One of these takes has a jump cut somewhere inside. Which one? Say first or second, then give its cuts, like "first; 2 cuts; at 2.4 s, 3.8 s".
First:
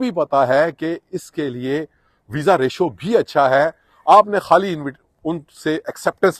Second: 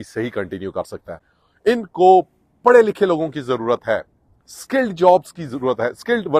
second; 1 cut; at 1.3 s